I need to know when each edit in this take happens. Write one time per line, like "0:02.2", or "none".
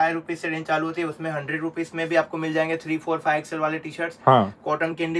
none